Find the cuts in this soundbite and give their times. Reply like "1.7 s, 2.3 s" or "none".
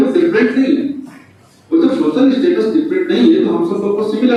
none

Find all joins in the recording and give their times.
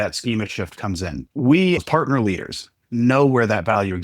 1.2 s, 1.8 s

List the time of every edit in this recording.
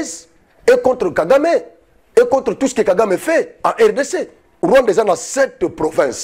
4.5 s

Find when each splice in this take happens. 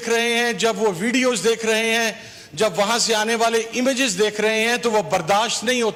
none

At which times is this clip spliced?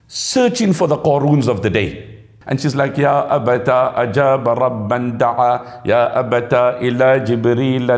2.3 s

